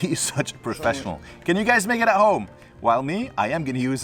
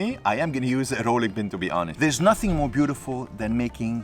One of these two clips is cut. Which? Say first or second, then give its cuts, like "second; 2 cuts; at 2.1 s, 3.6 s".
second; 1 cut; at 1.9 s